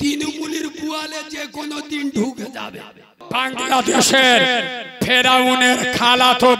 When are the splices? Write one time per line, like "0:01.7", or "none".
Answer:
0:03.2